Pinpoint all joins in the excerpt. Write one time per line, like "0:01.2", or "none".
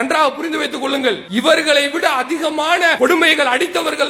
0:01.2
0:02.9